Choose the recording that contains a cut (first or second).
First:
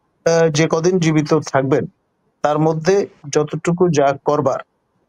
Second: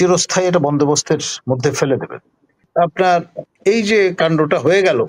second